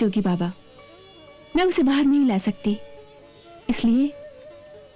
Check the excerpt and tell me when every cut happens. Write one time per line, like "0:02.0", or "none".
none